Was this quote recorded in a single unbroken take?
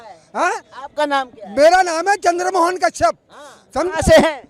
yes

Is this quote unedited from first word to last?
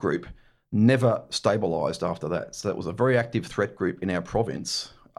yes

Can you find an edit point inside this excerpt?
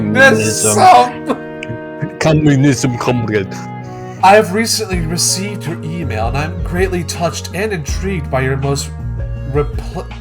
yes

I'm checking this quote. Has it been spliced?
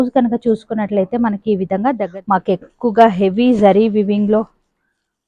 yes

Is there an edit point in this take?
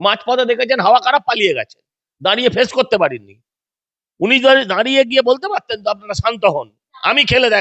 no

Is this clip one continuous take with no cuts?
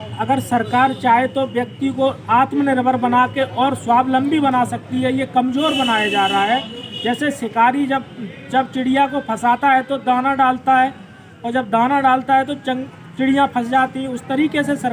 yes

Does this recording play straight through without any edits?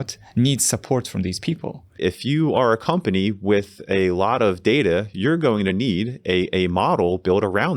no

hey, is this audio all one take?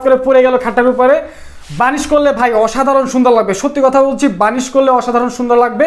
yes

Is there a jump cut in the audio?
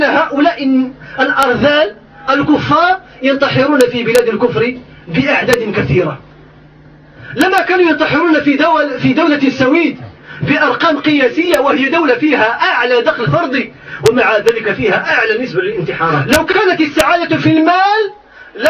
yes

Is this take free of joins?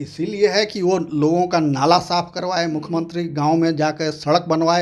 yes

